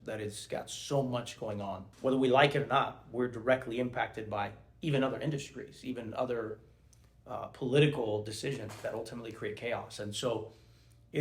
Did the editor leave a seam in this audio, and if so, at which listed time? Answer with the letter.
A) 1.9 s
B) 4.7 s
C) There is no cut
A